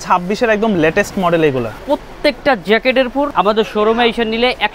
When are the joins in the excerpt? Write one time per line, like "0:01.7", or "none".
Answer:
0:01.8
0:03.3